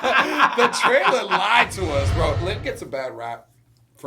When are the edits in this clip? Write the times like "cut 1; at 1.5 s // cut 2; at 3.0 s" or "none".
cut 1; at 2.4 s